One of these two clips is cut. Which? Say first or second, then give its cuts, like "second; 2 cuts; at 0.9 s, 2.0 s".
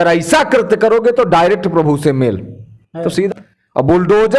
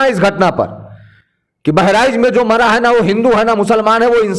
first; 1 cut; at 3.3 s